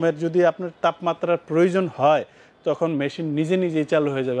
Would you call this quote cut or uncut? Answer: uncut